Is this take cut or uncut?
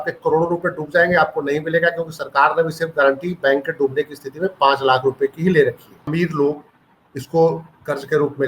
cut